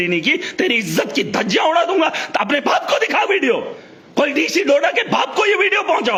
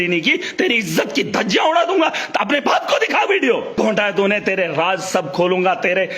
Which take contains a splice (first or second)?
second